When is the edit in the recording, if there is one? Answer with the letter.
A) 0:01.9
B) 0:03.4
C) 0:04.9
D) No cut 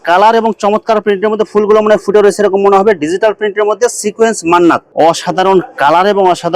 C